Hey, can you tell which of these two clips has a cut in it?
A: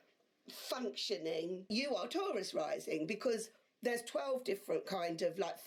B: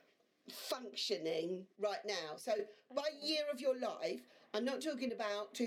A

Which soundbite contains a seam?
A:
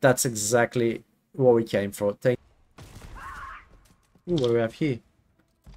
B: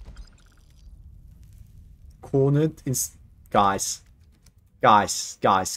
A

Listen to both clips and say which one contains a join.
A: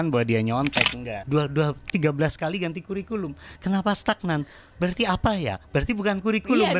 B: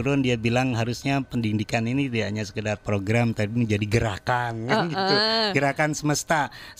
A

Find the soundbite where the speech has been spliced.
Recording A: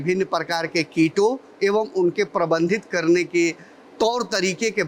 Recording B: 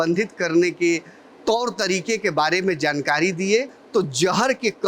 B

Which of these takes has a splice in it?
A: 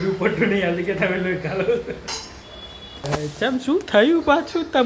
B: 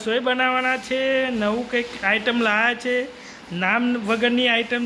A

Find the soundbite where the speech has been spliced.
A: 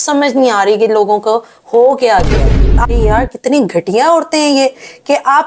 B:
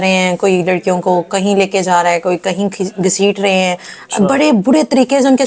A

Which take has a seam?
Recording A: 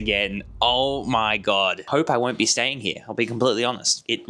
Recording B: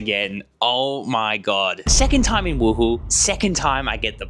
A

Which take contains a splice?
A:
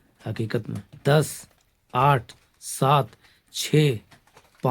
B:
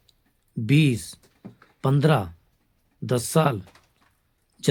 A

